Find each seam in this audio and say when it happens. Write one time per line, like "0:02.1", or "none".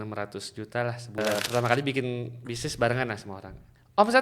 0:01.2